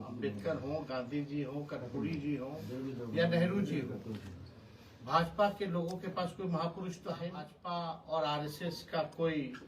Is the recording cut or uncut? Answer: cut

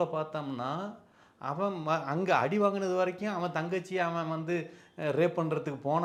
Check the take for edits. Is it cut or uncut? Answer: uncut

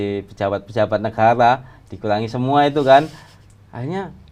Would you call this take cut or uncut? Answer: uncut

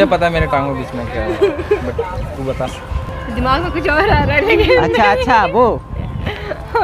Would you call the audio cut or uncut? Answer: cut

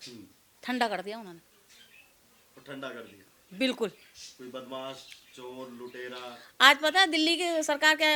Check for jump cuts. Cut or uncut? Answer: uncut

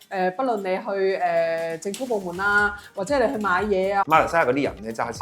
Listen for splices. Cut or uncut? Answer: cut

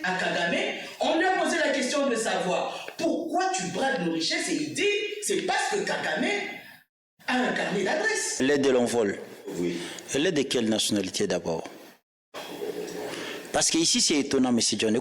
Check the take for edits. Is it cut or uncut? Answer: cut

